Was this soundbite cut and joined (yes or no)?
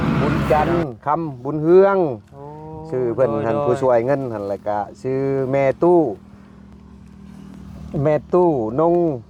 no